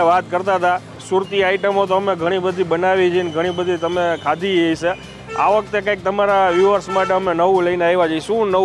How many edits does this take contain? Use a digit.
1